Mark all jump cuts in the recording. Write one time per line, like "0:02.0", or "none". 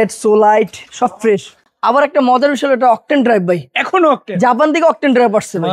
0:01.5